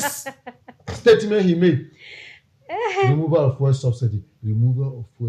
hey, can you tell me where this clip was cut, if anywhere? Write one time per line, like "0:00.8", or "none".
0:04.3